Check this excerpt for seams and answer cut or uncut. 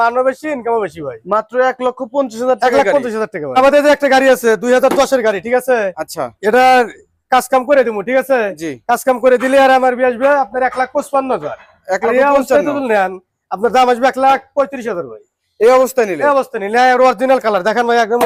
uncut